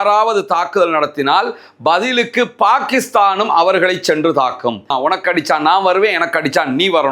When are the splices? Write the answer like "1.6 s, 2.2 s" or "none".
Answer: 4.9 s